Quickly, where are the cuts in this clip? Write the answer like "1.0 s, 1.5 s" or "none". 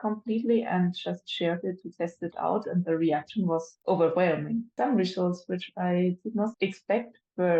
6.5 s